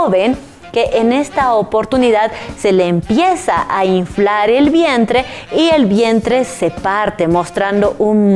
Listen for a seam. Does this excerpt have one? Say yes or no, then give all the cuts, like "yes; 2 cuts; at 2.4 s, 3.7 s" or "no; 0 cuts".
no; 0 cuts